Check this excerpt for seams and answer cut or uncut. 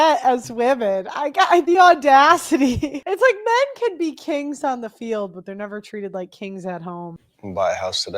cut